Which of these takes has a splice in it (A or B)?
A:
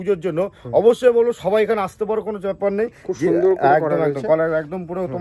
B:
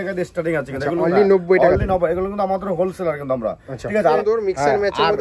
B